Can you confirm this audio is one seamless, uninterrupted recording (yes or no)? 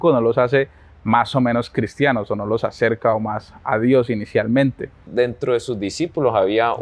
no